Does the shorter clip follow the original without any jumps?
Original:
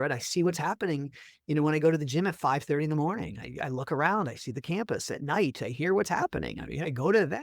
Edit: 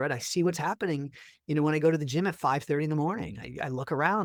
yes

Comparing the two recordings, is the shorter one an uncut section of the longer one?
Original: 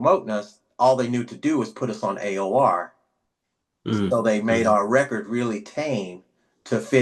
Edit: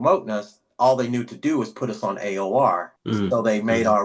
no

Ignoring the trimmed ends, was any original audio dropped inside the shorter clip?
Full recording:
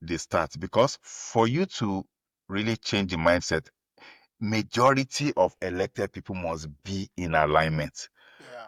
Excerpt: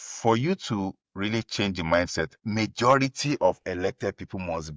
yes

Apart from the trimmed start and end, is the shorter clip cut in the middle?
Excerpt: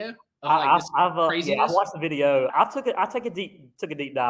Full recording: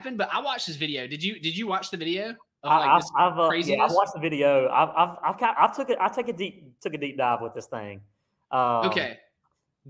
yes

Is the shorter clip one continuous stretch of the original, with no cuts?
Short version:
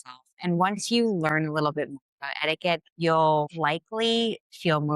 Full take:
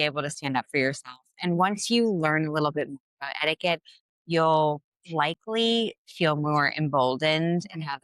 no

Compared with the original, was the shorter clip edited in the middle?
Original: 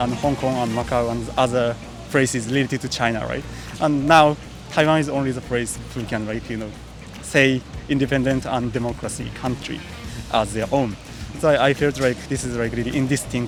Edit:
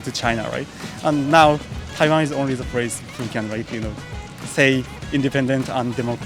no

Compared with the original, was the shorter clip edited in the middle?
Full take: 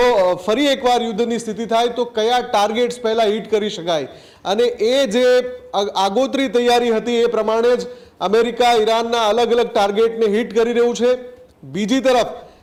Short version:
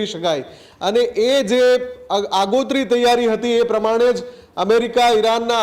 no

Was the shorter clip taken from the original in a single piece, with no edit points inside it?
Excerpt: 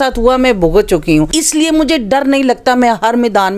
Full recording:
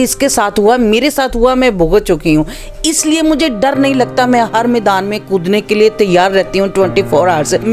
no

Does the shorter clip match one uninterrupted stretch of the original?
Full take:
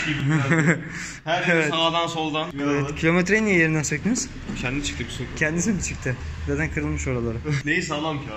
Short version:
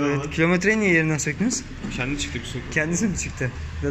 yes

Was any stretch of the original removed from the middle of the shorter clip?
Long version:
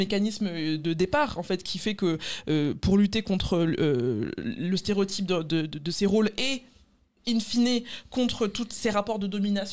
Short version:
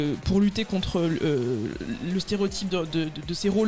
no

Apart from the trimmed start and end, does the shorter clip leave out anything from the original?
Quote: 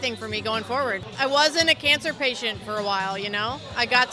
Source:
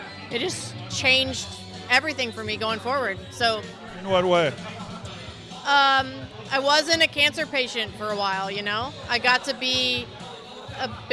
yes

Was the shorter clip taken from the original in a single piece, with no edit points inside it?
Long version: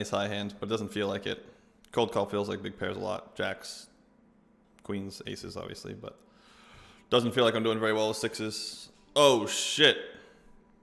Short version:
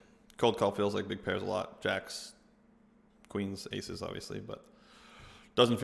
yes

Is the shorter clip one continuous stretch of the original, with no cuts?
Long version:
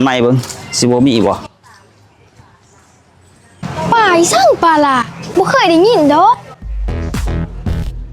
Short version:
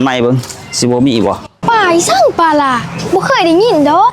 no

